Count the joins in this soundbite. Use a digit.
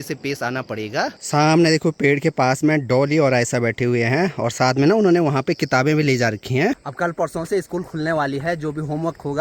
0